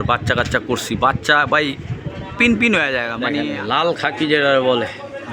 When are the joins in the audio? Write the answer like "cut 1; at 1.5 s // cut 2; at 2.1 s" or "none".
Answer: cut 1; at 3.5 s